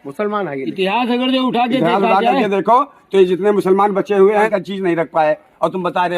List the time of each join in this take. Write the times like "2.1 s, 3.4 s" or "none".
4.5 s